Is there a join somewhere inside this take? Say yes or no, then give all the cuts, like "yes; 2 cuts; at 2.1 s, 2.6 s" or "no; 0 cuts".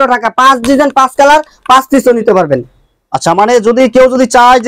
no; 0 cuts